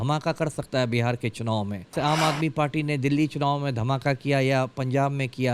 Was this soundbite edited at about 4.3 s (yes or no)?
no